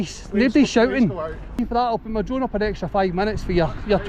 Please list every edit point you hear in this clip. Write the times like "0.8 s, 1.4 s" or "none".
1.6 s

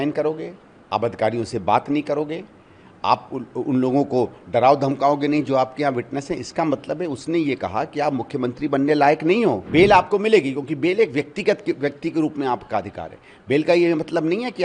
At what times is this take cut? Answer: 9.6 s

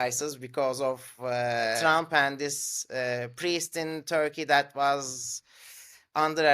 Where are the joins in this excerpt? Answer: 1.8 s

